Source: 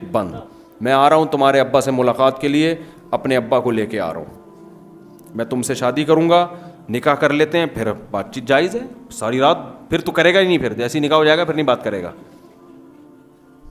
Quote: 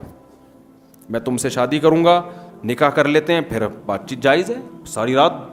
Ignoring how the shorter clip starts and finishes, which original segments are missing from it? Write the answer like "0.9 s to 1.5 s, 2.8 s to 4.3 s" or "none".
none